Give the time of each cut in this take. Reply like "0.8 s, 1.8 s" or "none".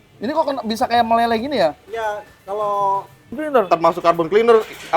3.4 s